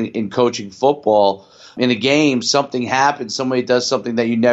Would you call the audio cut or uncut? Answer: cut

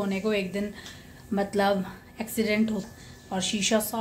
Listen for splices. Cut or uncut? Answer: cut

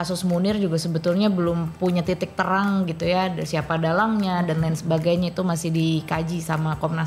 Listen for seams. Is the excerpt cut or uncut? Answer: uncut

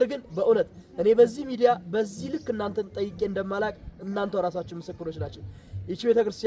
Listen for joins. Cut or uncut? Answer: uncut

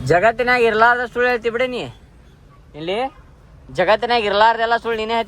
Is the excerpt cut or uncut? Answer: uncut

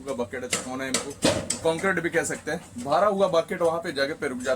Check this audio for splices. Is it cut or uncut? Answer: cut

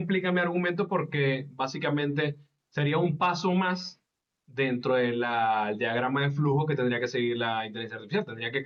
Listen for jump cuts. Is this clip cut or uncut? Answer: uncut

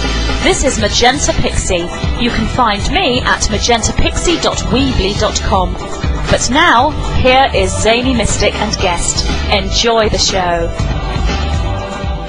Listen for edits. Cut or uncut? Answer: cut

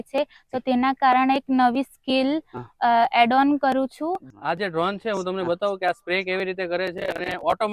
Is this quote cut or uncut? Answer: cut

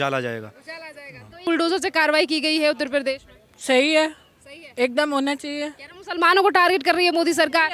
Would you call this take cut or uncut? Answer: cut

